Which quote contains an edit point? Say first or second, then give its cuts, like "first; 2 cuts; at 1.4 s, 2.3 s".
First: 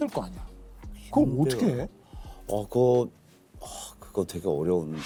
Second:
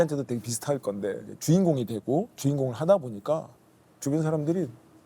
second; 1 cut; at 1.3 s